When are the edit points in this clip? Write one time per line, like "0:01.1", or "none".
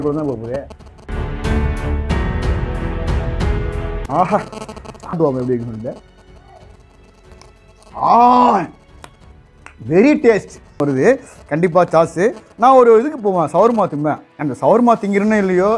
0:05.2
0:10.8